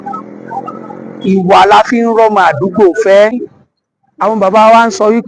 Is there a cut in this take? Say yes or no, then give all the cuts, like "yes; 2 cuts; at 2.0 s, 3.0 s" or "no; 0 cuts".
yes; 1 cut; at 3.4 s